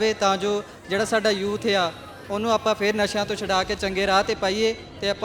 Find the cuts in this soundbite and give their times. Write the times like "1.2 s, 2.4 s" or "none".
none